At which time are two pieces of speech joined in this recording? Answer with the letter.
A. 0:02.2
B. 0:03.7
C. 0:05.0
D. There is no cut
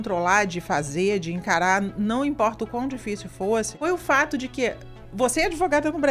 B